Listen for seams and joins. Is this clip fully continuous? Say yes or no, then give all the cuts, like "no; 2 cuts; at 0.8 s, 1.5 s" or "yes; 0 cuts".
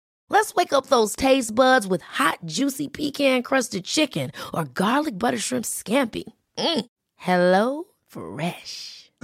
yes; 0 cuts